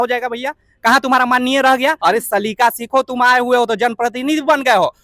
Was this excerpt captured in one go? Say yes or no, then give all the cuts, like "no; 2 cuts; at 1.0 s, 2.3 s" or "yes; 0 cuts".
no; 1 cut; at 2.0 s